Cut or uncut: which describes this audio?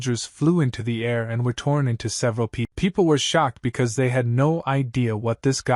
cut